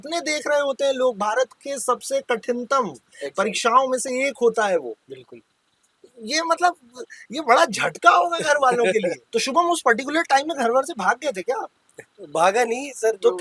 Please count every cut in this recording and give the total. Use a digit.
2